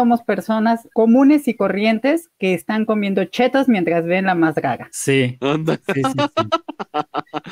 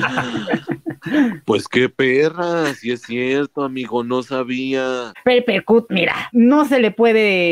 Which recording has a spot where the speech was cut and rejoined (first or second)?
second